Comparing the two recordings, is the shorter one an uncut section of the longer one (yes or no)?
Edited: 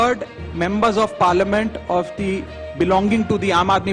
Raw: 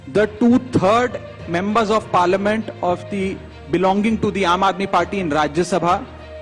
yes